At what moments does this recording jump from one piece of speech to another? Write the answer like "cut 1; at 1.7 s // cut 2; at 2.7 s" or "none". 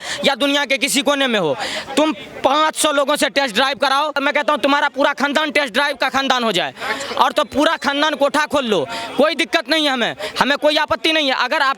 cut 1; at 4.2 s

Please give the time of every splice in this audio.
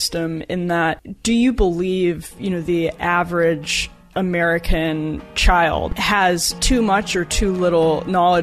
cut 1; at 5.9 s

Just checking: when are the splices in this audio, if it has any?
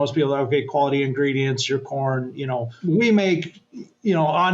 cut 1; at 2.7 s

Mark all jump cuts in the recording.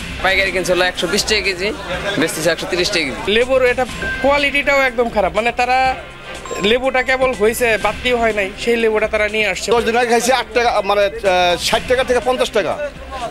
cut 1; at 3.2 s // cut 2; at 9.7 s

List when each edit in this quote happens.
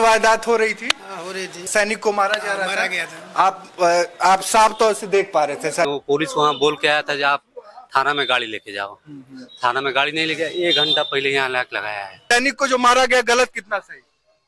cut 1; at 1.6 s // cut 2; at 5.9 s // cut 3; at 12.2 s

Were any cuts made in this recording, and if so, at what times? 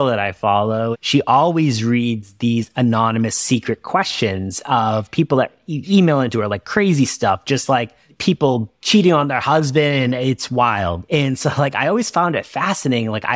cut 1; at 1.0 s // cut 2; at 8.4 s

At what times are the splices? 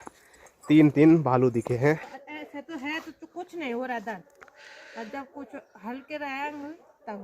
cut 1; at 2.0 s

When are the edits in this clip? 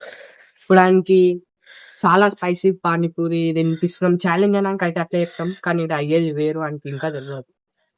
none

